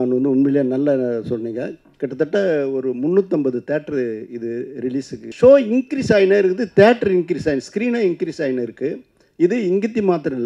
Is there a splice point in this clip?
yes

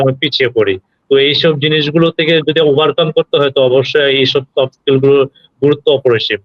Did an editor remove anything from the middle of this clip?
no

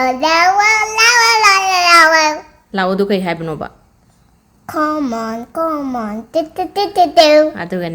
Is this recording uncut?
yes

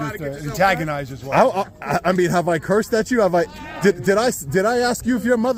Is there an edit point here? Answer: no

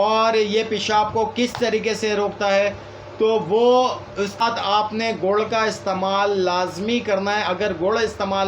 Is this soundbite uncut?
no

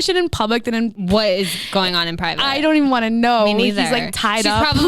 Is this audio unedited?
no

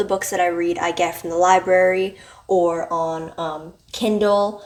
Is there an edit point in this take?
no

